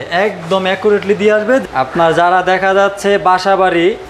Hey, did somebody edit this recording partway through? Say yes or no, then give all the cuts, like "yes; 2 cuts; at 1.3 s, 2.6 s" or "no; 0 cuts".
yes; 1 cut; at 1.6 s